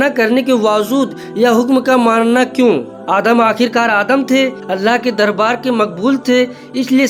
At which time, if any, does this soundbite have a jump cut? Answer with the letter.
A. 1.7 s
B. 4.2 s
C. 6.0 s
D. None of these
D